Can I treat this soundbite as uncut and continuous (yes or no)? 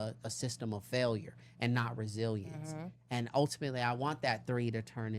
yes